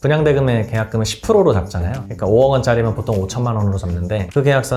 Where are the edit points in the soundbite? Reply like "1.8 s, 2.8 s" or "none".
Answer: none

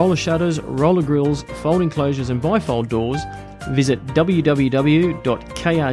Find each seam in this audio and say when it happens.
none

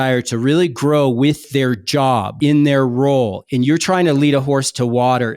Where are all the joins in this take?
1.4 s, 3.4 s

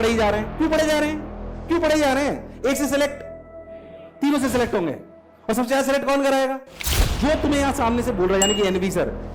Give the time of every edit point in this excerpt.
7.0 s

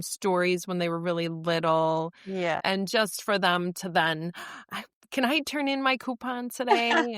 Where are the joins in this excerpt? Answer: 2.6 s

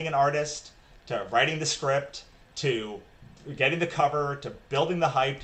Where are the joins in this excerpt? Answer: none

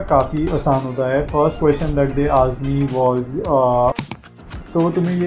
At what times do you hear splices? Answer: 4.1 s

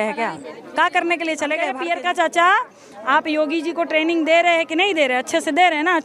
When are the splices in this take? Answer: 1.7 s

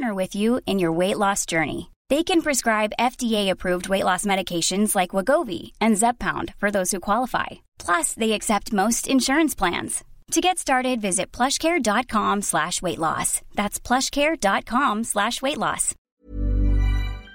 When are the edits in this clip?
15.9 s

